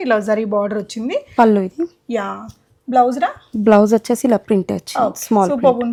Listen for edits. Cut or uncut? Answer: uncut